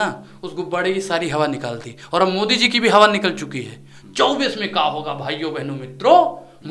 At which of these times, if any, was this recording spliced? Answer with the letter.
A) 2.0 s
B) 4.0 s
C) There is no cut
C